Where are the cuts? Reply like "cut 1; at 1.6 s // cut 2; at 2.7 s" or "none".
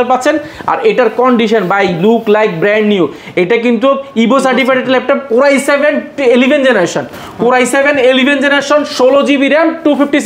none